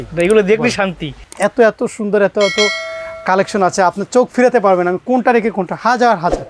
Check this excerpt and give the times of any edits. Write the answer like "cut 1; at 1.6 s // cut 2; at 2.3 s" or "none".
cut 1; at 1.3 s